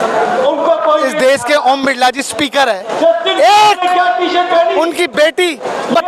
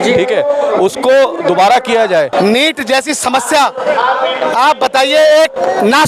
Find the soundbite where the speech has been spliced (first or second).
second